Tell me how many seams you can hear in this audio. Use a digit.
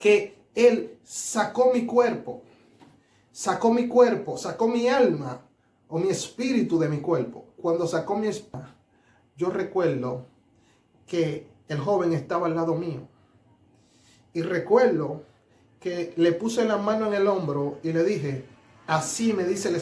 1